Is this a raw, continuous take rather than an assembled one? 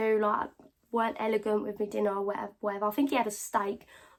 yes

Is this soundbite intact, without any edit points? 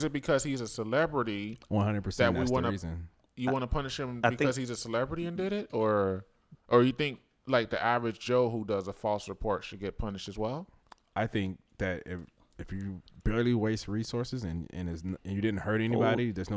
yes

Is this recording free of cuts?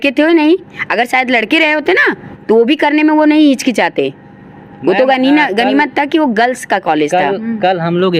yes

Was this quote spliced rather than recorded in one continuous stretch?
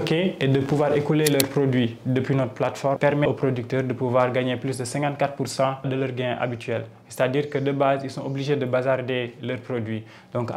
yes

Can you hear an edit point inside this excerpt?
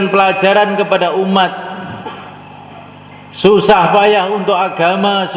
no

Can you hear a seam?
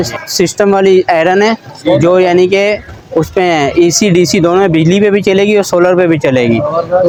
no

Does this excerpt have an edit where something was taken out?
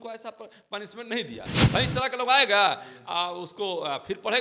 yes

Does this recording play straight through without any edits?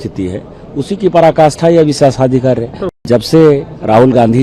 no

